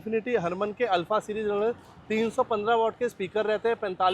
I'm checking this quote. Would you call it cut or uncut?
uncut